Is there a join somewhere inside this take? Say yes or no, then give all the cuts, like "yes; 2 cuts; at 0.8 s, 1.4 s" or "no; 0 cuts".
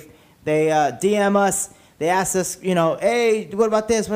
no; 0 cuts